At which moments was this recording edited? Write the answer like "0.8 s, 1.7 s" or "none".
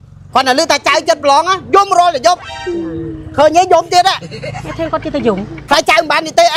none